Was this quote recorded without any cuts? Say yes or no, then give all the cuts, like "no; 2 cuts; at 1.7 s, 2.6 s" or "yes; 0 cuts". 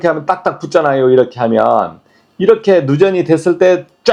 yes; 0 cuts